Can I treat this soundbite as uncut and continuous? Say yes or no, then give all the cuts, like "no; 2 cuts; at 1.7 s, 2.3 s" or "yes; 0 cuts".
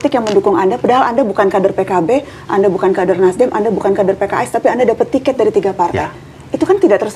yes; 0 cuts